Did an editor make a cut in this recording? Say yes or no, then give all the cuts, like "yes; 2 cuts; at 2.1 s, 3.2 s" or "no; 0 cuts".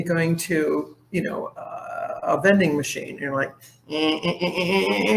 no; 0 cuts